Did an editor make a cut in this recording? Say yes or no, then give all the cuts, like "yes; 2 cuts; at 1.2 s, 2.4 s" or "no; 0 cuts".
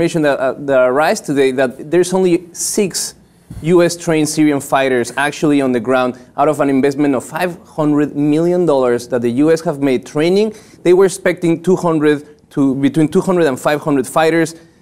no; 0 cuts